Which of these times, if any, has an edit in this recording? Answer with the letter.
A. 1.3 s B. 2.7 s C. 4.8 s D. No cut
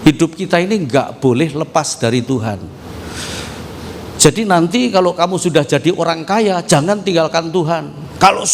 D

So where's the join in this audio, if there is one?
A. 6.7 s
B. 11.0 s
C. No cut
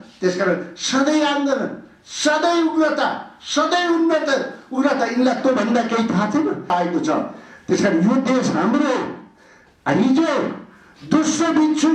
A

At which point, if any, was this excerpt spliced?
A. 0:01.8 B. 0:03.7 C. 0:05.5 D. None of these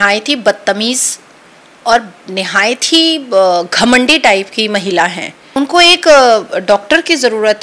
C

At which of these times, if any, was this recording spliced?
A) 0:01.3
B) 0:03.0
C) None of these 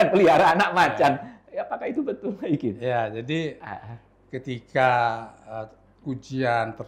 C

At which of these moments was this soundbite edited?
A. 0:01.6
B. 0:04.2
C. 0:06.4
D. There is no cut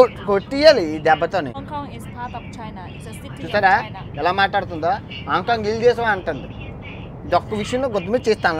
A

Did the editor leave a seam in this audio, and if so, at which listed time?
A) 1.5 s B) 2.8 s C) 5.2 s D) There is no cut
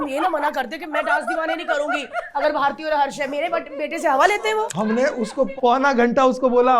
C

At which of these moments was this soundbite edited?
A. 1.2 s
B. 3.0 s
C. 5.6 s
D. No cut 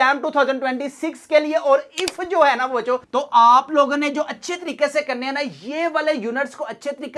B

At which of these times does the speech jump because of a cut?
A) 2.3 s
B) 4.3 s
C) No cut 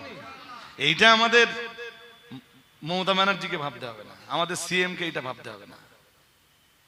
C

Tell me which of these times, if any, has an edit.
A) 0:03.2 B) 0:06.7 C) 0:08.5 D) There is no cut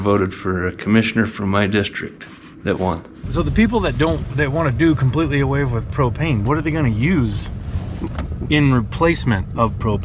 A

